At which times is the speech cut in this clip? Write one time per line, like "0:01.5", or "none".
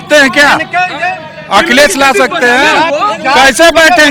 none